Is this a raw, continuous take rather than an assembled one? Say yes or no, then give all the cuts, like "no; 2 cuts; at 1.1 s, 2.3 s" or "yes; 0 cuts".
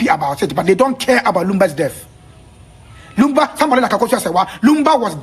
yes; 0 cuts